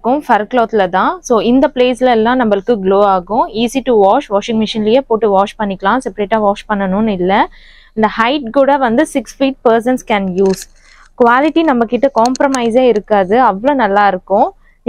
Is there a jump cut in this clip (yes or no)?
no